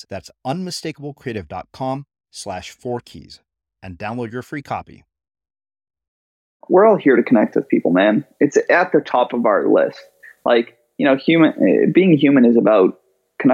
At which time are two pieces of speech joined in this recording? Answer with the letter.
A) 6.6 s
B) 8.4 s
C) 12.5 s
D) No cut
A